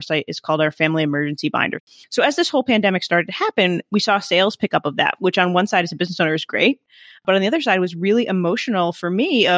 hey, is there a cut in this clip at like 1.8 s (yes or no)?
yes